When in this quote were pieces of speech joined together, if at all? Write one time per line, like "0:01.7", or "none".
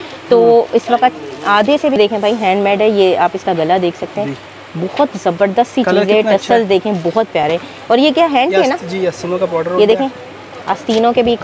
0:02.0